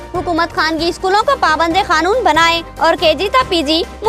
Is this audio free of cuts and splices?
yes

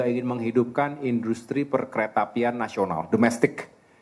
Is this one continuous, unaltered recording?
yes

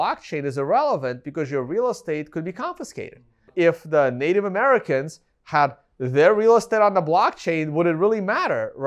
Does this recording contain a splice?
yes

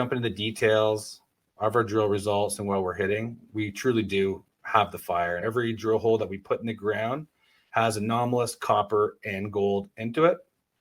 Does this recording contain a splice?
yes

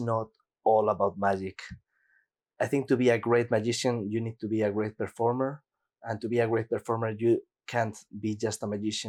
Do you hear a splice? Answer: no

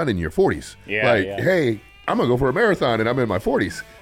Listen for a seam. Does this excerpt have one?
yes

